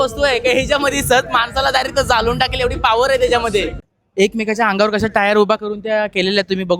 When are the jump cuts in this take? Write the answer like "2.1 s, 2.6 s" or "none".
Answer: 3.9 s